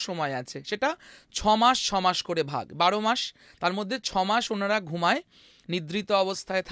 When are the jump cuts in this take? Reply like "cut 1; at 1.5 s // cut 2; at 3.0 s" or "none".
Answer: none